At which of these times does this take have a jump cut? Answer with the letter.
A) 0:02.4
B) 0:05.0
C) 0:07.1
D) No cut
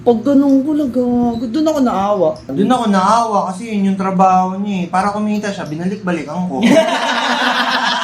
A